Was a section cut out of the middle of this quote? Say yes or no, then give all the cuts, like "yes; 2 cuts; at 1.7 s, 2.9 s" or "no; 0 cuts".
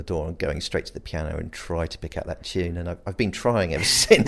no; 0 cuts